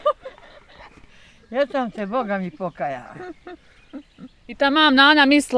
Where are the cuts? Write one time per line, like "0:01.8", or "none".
0:04.4